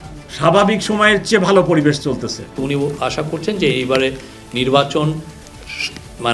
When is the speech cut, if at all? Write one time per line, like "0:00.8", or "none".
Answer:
0:02.5